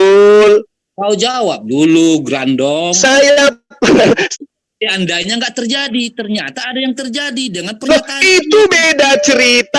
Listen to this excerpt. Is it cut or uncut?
cut